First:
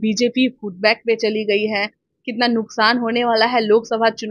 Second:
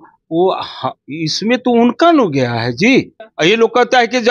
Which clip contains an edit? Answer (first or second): second